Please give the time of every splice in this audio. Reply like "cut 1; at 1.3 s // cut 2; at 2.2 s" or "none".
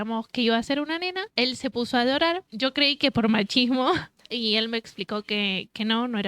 cut 1; at 1.2 s // cut 2; at 2.5 s // cut 3; at 4.2 s